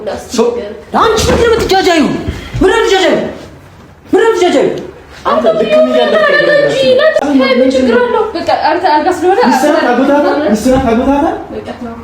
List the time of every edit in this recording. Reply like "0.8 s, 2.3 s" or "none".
7.2 s